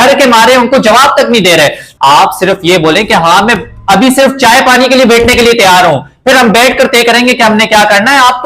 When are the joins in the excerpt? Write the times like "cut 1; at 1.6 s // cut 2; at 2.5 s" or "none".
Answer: cut 1; at 1.8 s

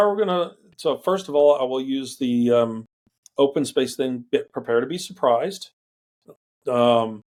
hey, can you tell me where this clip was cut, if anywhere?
none

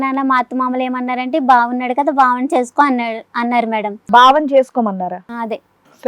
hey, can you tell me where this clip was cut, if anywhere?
cut 1; at 4.0 s

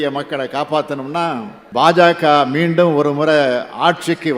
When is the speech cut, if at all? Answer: cut 1; at 1.6 s

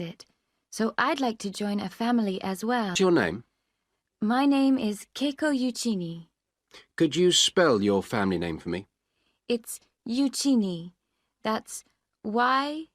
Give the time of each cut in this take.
cut 1; at 2.9 s

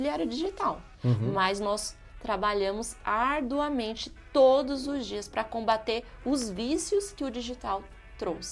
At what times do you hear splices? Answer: none

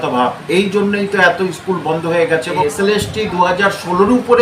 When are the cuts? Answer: cut 1; at 2.6 s

